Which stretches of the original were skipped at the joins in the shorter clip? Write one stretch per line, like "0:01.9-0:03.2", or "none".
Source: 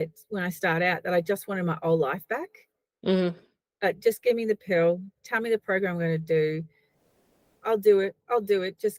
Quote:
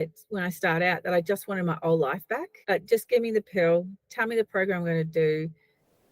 0:02.5-0:03.7